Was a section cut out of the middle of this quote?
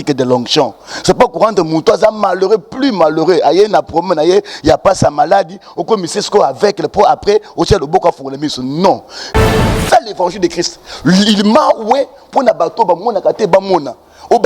yes; 1 cut; at 9.4 s

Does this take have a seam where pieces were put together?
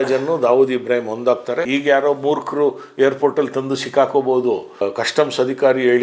yes; 2 cuts; at 1.7 s, 4.8 s

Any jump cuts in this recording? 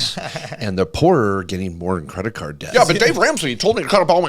yes; 1 cut; at 2.6 s

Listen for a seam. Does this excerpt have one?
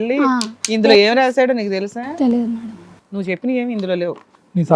no; 0 cuts

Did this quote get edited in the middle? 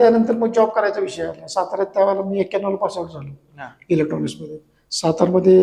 no; 0 cuts

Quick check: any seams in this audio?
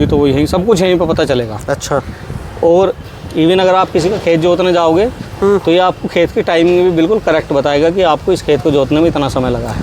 no; 0 cuts

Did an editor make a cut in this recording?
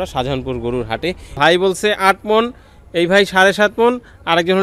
yes; 1 cut; at 1.3 s

